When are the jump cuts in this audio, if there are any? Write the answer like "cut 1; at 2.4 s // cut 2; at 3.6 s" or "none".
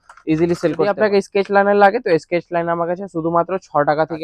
cut 1; at 0.9 s